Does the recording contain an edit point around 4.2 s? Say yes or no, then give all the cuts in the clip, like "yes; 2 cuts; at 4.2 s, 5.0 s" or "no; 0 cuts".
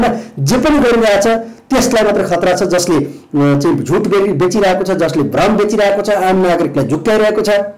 no; 0 cuts